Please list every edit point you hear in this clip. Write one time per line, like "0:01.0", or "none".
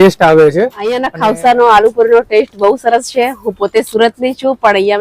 0:01.0